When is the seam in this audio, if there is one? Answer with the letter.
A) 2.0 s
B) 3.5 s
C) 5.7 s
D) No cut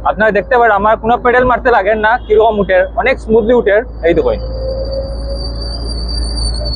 D